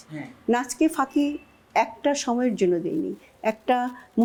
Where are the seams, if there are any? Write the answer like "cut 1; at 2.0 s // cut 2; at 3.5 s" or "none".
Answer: none

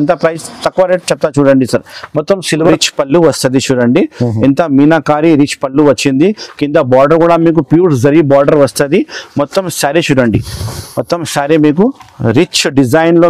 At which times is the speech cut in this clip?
cut 1; at 2.7 s

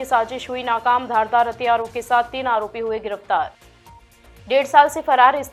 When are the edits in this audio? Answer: none

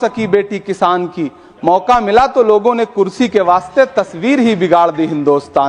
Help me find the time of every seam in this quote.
none

